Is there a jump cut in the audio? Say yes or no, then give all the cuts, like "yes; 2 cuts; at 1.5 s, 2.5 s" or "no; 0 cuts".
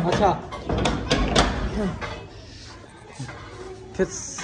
no; 0 cuts